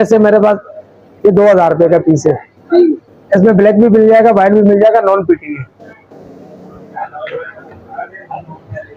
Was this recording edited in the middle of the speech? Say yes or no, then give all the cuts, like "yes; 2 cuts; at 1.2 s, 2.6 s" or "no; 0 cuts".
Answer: no; 0 cuts